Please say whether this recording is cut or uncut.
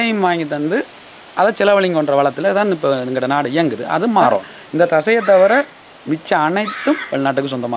cut